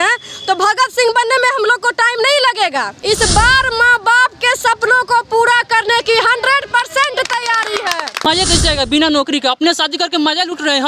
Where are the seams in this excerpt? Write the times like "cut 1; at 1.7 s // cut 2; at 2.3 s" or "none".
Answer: cut 1; at 2.9 s // cut 2; at 8.2 s

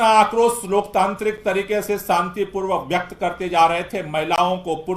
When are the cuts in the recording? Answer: none

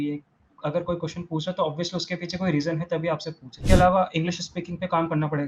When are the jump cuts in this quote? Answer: cut 1; at 3.5 s

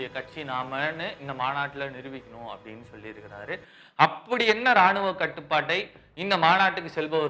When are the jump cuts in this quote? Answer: none

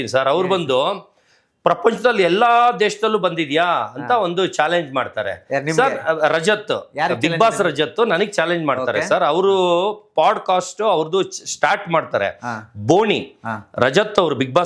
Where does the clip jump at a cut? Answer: none

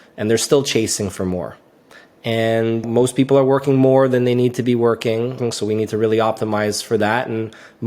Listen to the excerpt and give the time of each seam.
cut 1; at 2.9 s // cut 2; at 5.4 s

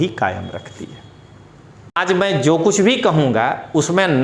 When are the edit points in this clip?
cut 1; at 2.0 s

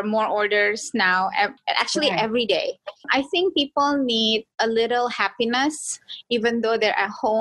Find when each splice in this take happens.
cut 1; at 1.6 s // cut 2; at 3.0 s // cut 3; at 4.5 s

